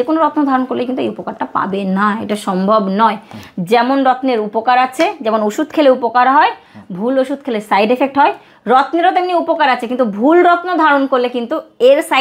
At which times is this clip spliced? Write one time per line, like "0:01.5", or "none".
none